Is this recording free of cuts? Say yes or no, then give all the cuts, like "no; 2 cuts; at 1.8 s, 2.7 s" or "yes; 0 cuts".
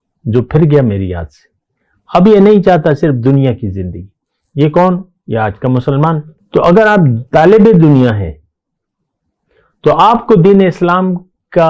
yes; 0 cuts